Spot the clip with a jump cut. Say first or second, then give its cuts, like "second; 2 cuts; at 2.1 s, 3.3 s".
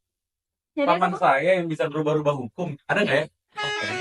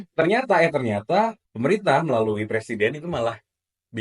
second; 1 cut; at 1.4 s